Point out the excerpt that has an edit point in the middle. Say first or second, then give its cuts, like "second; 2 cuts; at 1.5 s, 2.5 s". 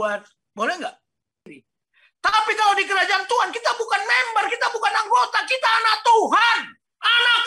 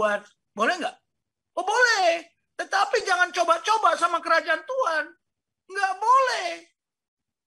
first; 1 cut; at 1.5 s